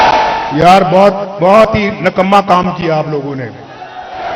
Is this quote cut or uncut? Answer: uncut